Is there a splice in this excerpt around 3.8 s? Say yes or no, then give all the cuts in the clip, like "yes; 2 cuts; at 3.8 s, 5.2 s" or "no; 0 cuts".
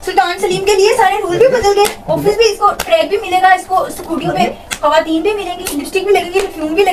no; 0 cuts